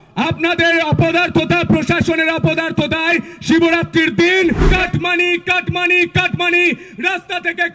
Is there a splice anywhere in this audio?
yes; 1 cut; at 4.6 s

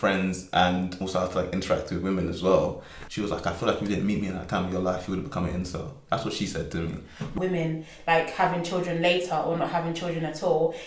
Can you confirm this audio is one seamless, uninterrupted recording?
no; 2 cuts; at 2.9 s, 7.3 s

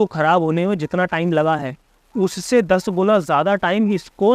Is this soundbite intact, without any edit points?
yes; 0 cuts

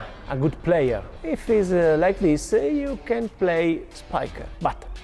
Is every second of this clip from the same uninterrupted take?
no; 3 cuts; at 1.1 s, 3.3 s, 4.2 s

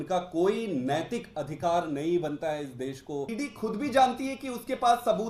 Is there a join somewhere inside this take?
yes; 1 cut; at 3.3 s

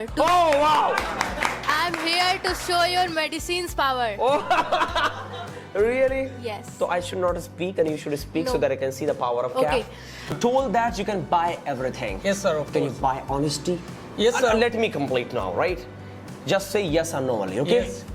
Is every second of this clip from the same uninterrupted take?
no; 1 cut; at 10.3 s

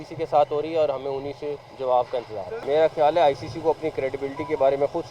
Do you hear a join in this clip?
yes; 2 cuts; at 1.7 s, 2.6 s

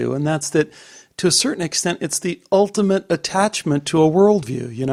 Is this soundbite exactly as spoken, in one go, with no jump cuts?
yes; 0 cuts

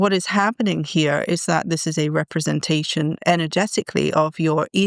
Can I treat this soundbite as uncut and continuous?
yes; 0 cuts

